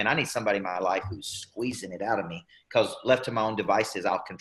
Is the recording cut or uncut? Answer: uncut